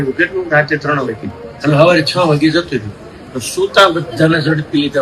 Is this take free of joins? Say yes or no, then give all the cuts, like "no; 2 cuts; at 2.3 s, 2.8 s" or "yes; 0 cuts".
yes; 0 cuts